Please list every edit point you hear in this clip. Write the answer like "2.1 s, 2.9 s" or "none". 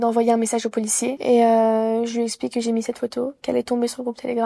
1.1 s